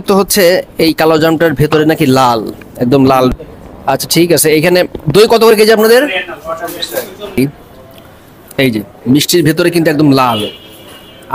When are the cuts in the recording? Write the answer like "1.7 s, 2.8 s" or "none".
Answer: 3.3 s, 7.4 s

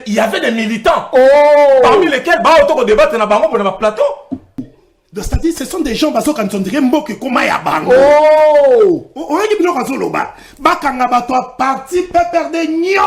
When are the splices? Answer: 4.6 s

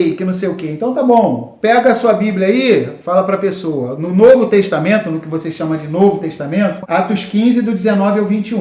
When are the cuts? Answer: 6.8 s

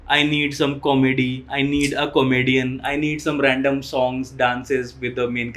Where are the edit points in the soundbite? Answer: none

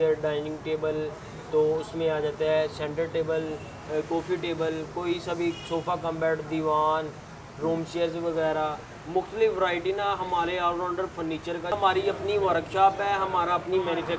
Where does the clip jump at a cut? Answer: 11.7 s

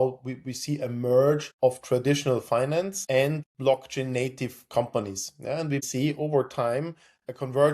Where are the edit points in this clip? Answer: 3.3 s, 5.8 s

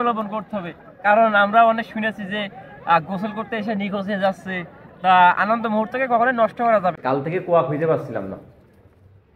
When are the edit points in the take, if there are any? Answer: 7.0 s

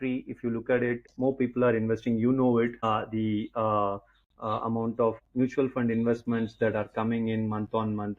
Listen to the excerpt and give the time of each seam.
1.1 s, 2.8 s, 5.2 s

